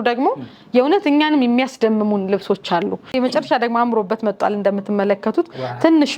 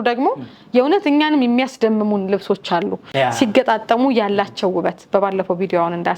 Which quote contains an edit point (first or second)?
first